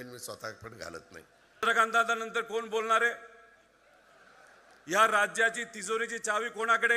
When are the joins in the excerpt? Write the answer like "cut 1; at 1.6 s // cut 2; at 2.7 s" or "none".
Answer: cut 1; at 1.7 s